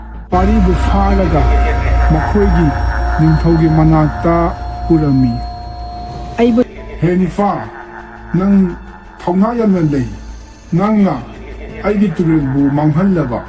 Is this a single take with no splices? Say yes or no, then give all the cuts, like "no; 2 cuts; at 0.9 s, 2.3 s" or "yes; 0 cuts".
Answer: no; 1 cut; at 6.7 s